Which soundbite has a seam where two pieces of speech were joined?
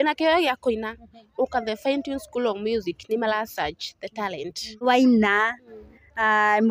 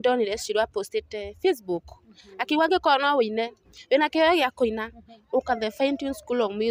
first; 1 cut; at 4.9 s

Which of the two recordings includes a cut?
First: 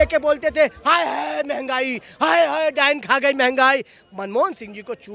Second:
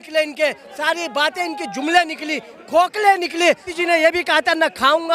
second; 1 cut; at 3.7 s

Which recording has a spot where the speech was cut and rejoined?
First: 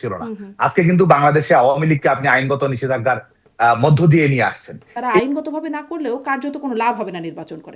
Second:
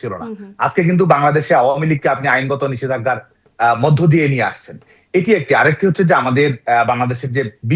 first; 1 cut; at 5.2 s

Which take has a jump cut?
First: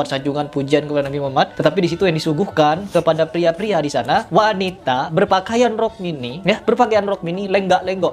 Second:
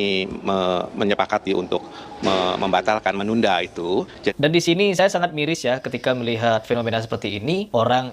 second; 1 cut; at 4.3 s

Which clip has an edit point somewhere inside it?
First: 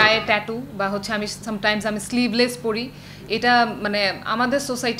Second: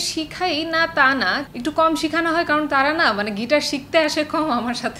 second; 1 cut; at 1.4 s

